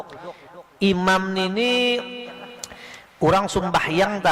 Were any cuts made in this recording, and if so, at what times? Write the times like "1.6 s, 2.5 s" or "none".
2.7 s

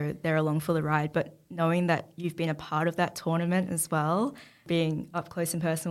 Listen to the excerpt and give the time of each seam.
4.6 s

